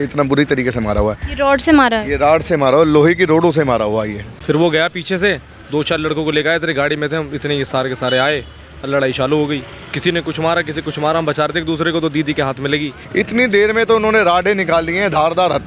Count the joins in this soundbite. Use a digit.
2